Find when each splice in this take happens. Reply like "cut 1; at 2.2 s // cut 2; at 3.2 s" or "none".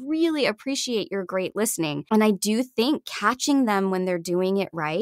cut 1; at 2.0 s

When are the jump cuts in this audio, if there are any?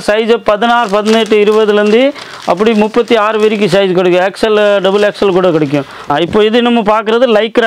cut 1; at 6.0 s

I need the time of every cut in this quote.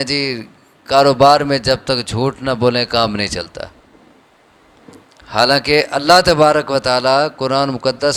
none

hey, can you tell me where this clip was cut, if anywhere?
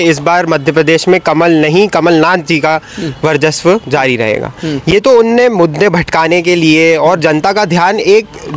none

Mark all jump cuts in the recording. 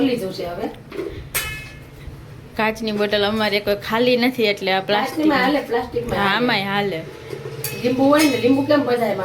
none

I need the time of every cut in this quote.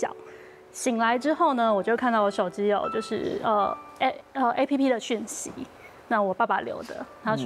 none

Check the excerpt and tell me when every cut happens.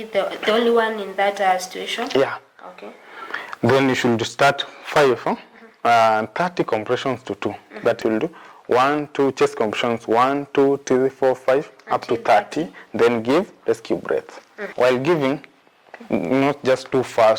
cut 1; at 8.0 s // cut 2; at 14.6 s

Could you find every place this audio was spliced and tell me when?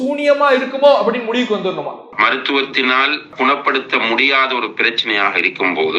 none

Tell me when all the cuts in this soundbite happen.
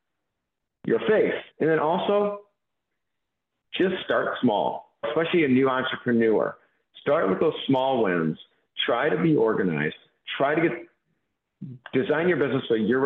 cut 1; at 2.9 s

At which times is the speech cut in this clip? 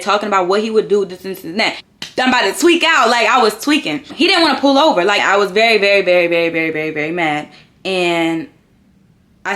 cut 1; at 1.8 s // cut 2; at 4.0 s // cut 3; at 5.2 s

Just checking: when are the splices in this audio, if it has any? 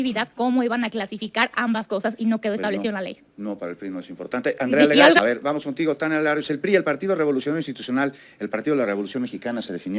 cut 1; at 5.2 s

